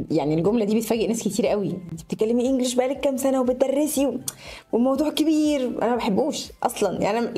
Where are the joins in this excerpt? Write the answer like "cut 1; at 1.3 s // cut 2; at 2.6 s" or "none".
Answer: none